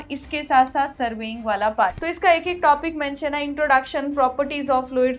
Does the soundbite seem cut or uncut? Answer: cut